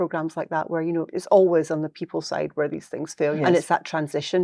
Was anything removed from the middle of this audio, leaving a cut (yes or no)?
yes